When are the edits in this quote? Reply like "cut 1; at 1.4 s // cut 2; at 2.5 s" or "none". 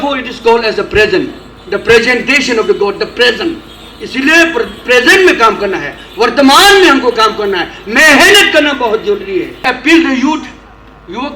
cut 1; at 9.6 s

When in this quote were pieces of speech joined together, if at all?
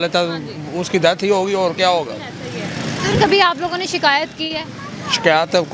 none

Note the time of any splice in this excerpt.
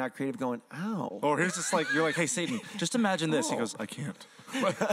none

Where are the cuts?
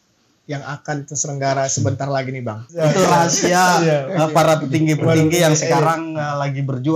cut 1; at 2.7 s

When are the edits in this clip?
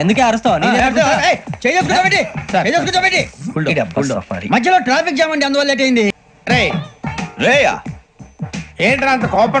cut 1; at 6.2 s

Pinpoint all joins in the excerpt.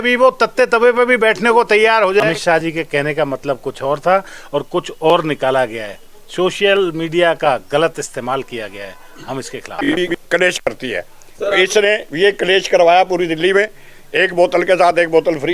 cut 1; at 2.2 s // cut 2; at 10.0 s

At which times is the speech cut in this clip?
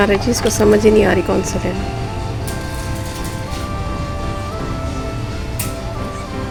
none

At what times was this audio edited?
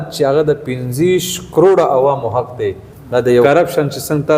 cut 1; at 3.4 s

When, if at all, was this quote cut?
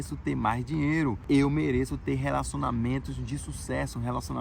cut 1; at 1.2 s

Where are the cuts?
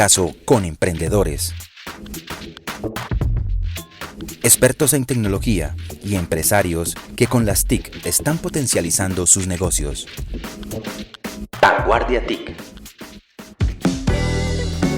cut 1; at 13.4 s

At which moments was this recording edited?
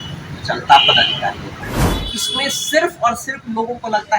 cut 1; at 1.9 s

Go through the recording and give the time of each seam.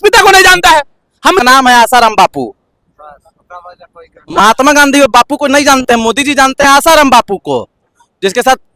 cut 1; at 1.4 s

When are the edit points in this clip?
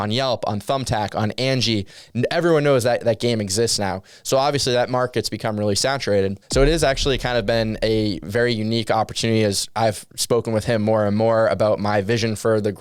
cut 1; at 2.0 s // cut 2; at 6.5 s

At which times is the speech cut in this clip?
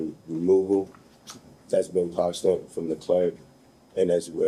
none

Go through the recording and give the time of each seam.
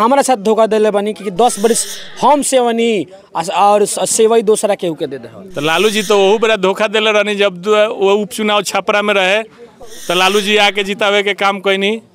none

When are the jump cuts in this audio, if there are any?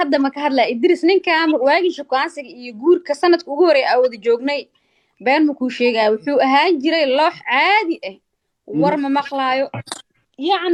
none

